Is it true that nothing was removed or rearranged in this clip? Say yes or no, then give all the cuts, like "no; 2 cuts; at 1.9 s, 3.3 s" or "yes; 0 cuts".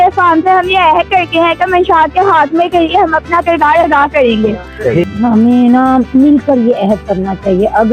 no; 1 cut; at 4.9 s